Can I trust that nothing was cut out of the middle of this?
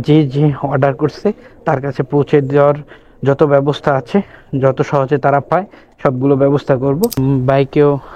no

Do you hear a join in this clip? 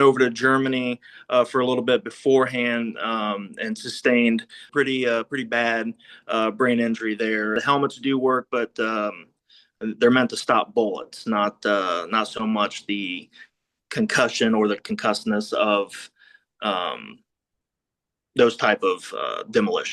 yes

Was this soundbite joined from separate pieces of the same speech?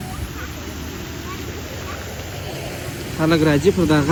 no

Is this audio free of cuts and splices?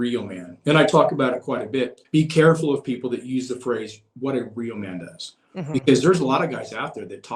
no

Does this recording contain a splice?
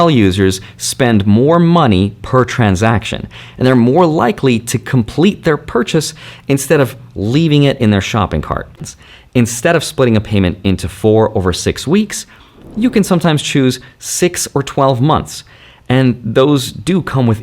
yes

